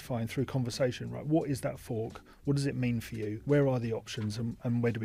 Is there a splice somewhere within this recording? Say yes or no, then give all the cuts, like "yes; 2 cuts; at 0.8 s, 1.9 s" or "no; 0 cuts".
no; 0 cuts